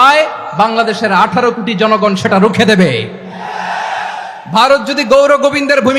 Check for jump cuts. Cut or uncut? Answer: uncut